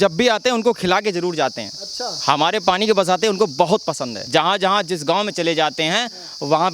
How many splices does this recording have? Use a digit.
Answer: 1